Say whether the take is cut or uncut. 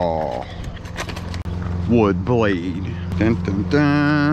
cut